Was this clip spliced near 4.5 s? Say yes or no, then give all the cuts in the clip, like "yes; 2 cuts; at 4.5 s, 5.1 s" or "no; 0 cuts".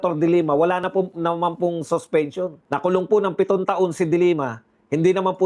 no; 1 cut; at 2.6 s